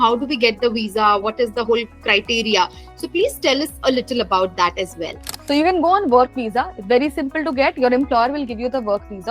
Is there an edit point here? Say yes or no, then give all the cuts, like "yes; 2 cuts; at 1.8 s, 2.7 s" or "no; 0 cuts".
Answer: yes; 1 cut; at 5.3 s